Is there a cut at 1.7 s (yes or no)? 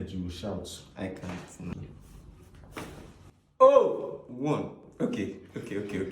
yes